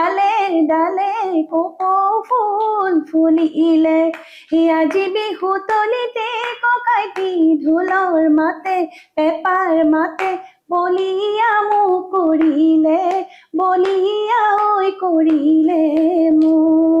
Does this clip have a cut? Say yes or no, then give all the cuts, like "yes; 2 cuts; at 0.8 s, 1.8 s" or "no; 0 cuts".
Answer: no; 0 cuts